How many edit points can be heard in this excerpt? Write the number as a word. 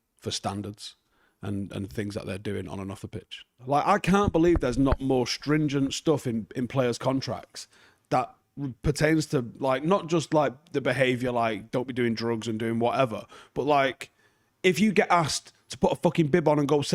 one